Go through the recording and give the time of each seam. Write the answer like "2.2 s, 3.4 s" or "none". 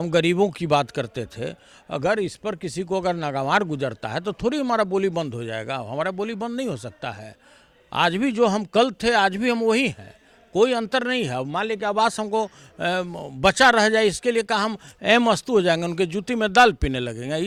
none